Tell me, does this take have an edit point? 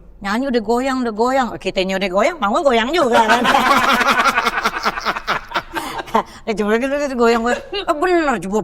no; 0 cuts

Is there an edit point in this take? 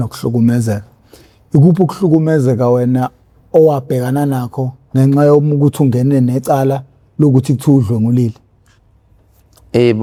no; 0 cuts

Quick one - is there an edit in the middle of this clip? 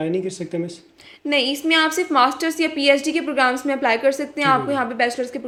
no; 0 cuts

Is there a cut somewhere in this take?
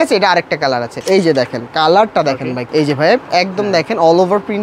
yes; 2 cuts; at 0.9 s, 2.6 s

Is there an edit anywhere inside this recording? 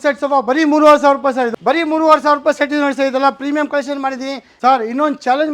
yes; 2 cuts; at 1.5 s, 4.5 s

